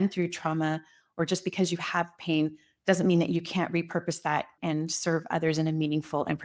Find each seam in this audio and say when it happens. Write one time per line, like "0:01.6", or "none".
0:04.6